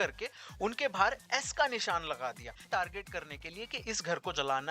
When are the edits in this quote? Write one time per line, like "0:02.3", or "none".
0:02.7